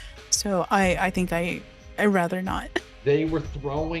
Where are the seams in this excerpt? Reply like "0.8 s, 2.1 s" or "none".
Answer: 2.8 s